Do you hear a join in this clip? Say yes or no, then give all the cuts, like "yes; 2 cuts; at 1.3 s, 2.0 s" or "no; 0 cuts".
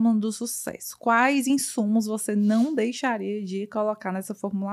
no; 0 cuts